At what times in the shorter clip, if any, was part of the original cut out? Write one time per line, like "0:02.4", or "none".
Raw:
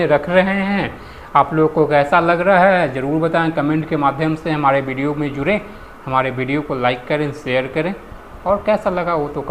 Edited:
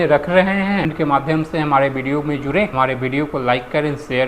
0:00.9
0:02.7

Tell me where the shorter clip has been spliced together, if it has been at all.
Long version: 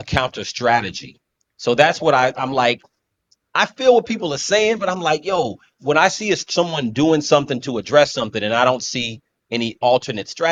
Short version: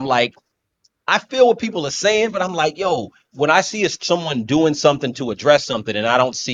none

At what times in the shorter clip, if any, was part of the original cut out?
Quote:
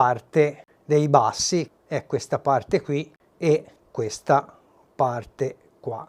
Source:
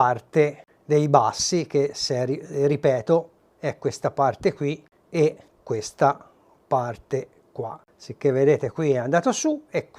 0:01.7

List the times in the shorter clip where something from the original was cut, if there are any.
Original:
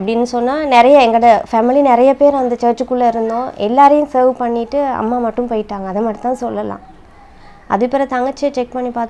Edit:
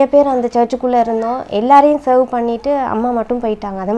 none

